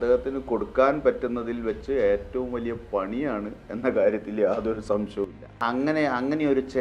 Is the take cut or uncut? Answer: cut